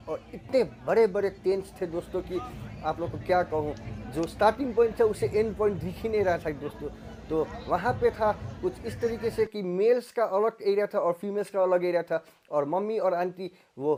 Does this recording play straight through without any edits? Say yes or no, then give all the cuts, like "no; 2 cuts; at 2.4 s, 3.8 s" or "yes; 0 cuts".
yes; 0 cuts